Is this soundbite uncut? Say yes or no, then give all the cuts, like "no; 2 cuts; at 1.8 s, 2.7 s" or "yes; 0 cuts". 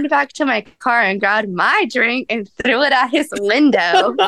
yes; 0 cuts